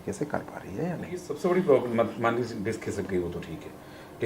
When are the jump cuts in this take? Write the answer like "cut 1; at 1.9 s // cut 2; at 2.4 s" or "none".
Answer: cut 1; at 1.3 s